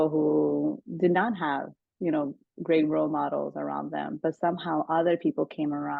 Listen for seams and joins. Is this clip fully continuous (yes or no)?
yes